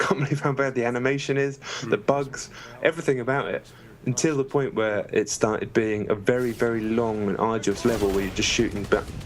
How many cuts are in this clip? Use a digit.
1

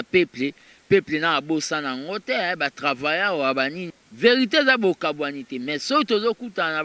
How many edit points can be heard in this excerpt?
1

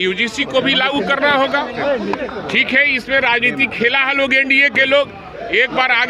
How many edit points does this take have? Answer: 0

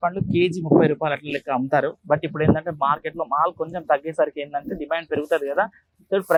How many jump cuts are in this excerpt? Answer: 0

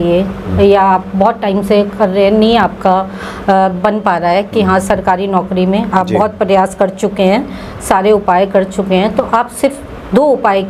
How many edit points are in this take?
0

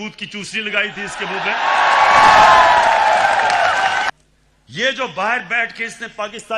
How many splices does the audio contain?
1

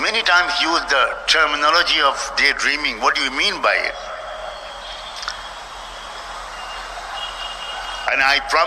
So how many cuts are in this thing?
0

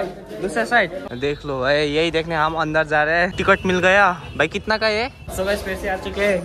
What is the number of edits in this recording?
3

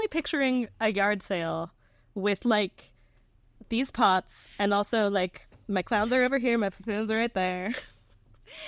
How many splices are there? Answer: 0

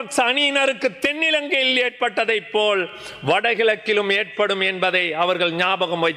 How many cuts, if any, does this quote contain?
0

